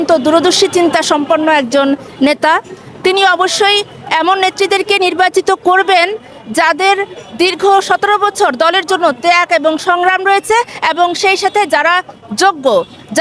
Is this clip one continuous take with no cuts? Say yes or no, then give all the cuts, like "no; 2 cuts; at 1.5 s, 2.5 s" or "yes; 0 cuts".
yes; 0 cuts